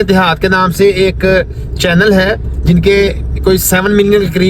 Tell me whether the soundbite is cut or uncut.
uncut